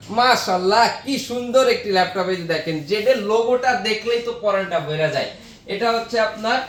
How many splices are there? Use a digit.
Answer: 0